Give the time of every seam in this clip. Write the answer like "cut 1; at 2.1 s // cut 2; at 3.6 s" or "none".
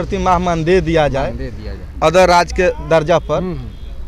none